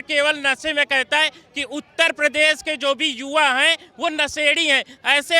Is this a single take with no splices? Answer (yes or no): yes